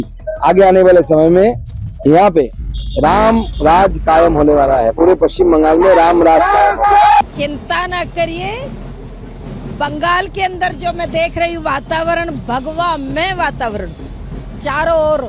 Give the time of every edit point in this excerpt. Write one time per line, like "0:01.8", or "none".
0:07.2